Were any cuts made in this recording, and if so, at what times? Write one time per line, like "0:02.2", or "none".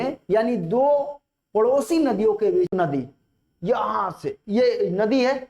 0:02.7